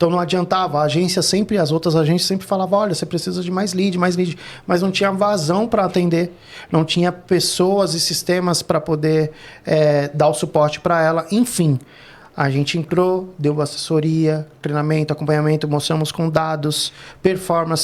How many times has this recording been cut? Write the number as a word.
zero